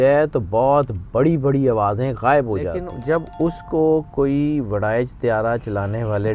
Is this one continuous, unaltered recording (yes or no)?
no